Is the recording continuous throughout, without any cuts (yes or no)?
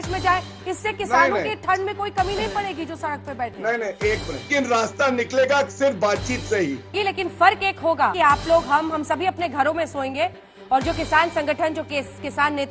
no